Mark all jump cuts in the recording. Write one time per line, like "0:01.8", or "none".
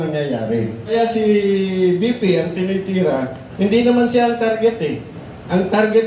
0:00.9